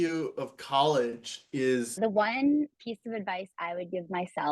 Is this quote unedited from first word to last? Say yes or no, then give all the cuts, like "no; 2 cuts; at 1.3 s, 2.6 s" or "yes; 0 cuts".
no; 1 cut; at 2.0 s